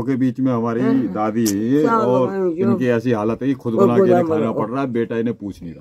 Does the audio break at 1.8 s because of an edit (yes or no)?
no